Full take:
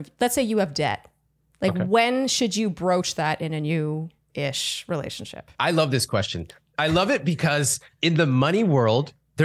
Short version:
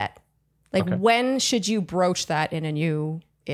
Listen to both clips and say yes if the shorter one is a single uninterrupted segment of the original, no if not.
yes